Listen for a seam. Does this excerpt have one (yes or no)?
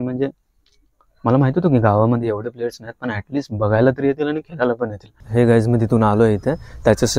yes